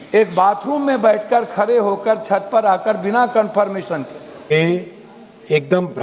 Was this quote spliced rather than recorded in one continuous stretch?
yes; 1 cut; at 4.5 s

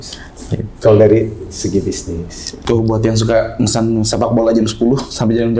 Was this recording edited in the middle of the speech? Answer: yes; 1 cut; at 2.4 s

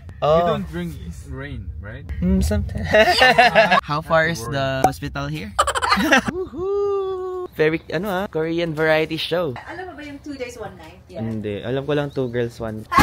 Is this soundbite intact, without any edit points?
no; 4 cuts; at 2.9 s, 6.3 s, 7.5 s, 11.0 s

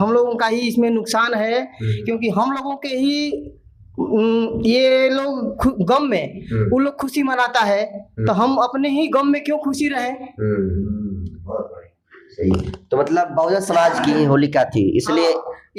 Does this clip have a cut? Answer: no; 0 cuts

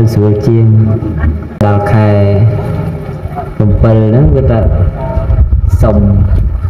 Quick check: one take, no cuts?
no; 1 cut; at 1.6 s

